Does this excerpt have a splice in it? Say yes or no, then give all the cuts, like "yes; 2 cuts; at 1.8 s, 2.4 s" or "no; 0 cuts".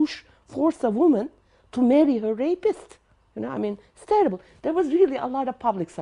no; 0 cuts